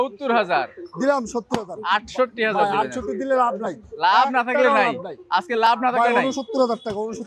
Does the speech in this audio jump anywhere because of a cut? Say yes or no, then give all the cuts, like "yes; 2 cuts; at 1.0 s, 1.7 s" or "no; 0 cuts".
no; 0 cuts